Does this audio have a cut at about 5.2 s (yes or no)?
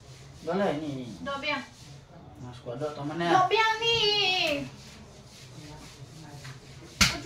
yes